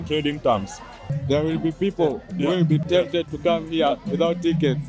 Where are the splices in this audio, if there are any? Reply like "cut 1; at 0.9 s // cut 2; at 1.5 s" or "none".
cut 1; at 1.1 s // cut 2; at 2.8 s